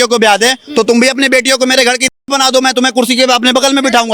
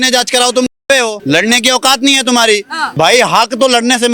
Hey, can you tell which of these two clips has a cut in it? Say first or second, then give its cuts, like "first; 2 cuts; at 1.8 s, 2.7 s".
second; 2 cuts; at 1.2 s, 2.8 s